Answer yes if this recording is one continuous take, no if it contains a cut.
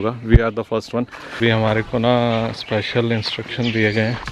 no